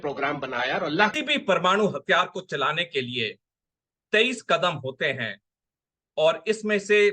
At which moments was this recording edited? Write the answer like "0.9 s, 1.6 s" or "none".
1.1 s

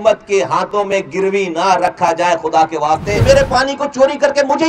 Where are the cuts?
3.2 s

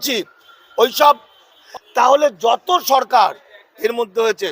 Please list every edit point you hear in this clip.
1.5 s

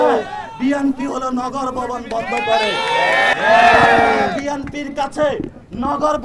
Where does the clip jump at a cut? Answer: 3.3 s

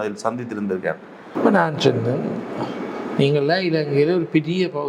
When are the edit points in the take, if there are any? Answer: 1.3 s

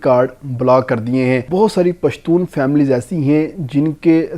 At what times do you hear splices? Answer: 1.5 s

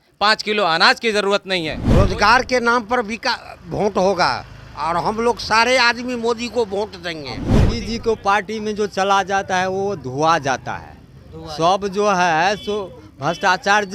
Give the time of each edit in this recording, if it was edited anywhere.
1.8 s, 7.5 s

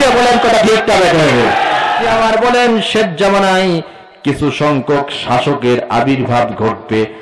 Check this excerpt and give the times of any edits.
2.0 s

